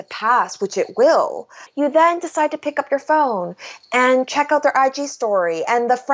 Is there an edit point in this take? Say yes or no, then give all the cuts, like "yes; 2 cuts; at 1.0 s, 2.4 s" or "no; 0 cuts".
yes; 1 cut; at 1.6 s